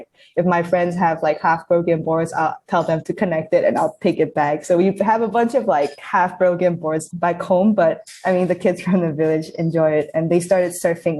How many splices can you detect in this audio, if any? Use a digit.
2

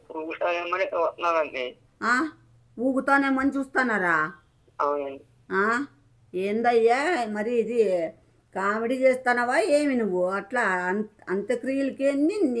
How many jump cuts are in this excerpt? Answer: 0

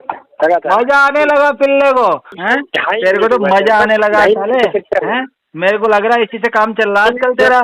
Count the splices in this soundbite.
1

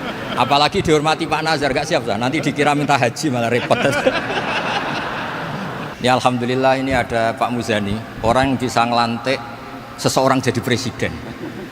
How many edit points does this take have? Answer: 1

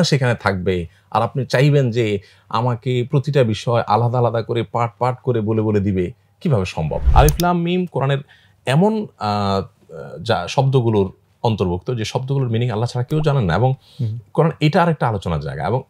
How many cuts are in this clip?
1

